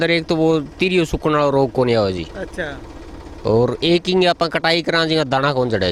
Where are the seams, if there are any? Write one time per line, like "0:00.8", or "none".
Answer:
none